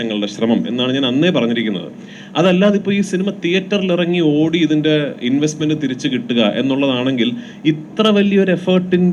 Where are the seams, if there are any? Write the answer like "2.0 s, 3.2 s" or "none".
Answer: none